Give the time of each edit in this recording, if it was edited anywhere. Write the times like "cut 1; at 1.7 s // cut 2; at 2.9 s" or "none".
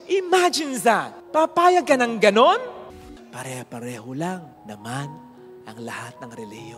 cut 1; at 3.1 s